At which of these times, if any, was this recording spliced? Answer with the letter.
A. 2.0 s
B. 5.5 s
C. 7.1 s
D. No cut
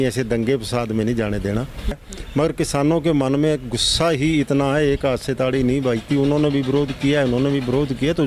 A